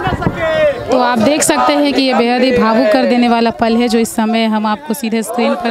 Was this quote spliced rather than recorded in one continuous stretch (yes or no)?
no